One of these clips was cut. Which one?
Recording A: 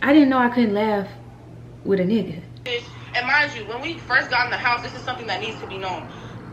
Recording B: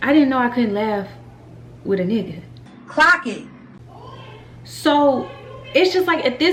A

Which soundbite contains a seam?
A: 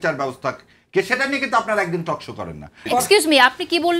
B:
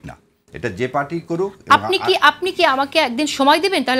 A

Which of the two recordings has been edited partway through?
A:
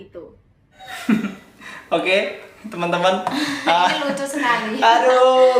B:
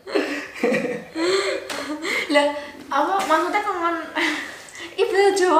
A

